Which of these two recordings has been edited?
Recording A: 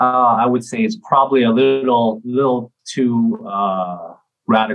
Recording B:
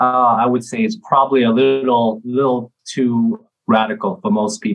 B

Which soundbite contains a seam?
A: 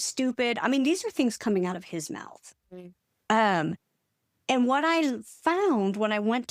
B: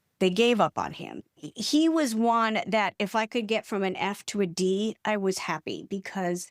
B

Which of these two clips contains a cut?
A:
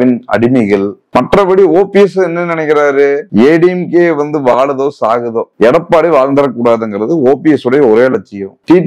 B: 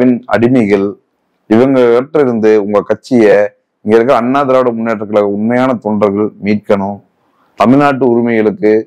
A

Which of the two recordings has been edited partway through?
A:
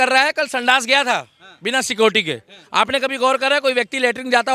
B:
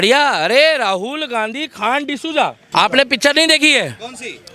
B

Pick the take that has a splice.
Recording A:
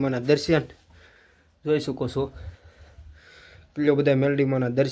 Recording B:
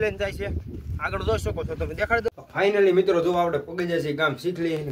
B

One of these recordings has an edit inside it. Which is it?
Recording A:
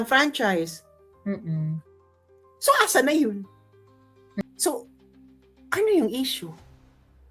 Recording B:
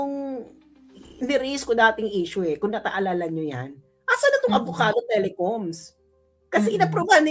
A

